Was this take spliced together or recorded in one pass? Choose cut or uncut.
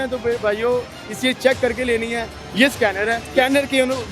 cut